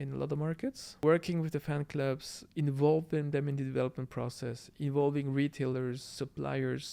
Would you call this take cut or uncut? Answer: cut